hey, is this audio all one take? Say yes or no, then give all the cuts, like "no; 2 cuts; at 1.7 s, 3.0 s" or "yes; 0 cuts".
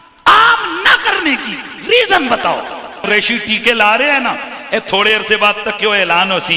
no; 1 cut; at 3.0 s